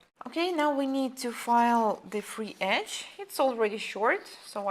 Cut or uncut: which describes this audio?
cut